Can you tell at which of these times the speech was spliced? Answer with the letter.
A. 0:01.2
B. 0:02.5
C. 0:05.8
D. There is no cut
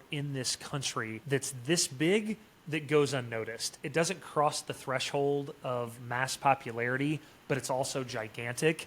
A